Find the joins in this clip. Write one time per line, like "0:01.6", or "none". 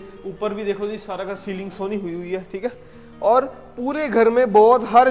none